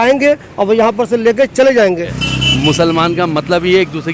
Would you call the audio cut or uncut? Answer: cut